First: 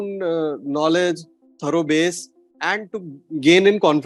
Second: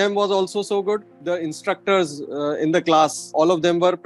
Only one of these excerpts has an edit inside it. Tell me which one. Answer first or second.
second